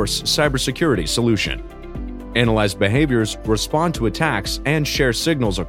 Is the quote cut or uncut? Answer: uncut